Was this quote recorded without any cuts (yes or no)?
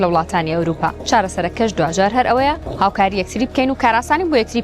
no